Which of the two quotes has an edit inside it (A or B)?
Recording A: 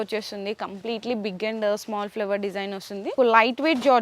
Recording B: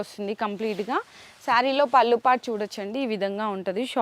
A